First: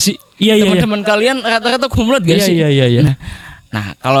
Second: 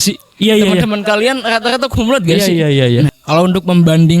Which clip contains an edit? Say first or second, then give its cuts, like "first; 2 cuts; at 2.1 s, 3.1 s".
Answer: second; 1 cut; at 3.2 s